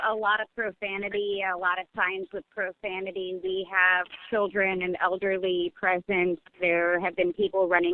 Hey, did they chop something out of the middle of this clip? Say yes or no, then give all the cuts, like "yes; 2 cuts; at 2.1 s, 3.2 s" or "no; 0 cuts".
no; 0 cuts